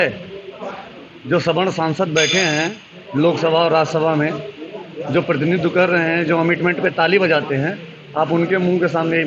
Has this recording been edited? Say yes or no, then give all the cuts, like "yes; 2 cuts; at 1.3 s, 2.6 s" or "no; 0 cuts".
no; 0 cuts